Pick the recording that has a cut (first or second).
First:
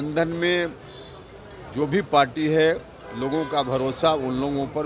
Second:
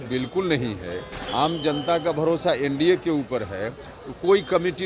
second